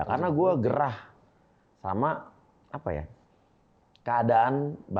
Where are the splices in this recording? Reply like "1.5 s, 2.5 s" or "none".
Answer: none